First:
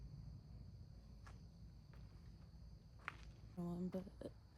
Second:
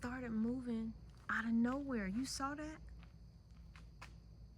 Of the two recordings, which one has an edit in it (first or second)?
first